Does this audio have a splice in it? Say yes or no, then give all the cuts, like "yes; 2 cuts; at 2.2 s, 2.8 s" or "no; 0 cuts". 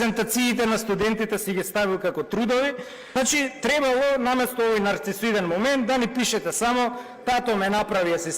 yes; 1 cut; at 2.9 s